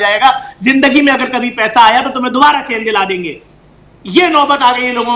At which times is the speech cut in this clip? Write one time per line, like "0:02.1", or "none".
none